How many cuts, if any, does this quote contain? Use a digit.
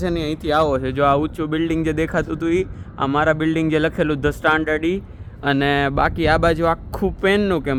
0